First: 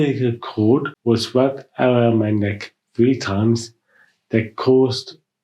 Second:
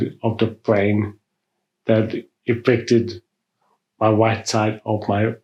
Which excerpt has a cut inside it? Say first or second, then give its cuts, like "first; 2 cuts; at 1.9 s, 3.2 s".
first; 1 cut; at 0.9 s